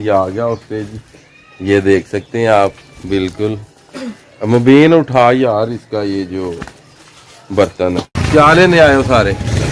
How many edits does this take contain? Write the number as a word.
one